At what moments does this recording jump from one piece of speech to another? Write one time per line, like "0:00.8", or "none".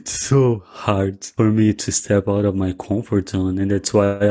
0:01.3